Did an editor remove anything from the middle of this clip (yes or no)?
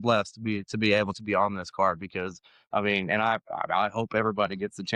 no